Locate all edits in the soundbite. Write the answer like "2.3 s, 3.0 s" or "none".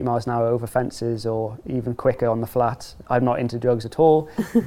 2.9 s